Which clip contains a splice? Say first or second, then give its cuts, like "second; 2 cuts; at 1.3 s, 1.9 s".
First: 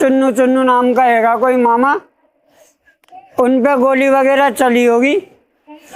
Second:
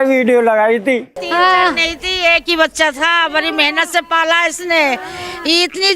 second; 1 cut; at 1.1 s